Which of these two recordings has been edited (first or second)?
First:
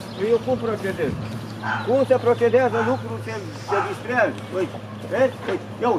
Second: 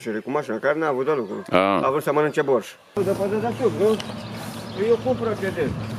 second